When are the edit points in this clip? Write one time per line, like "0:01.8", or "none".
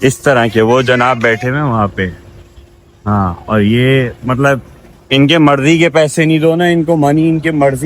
none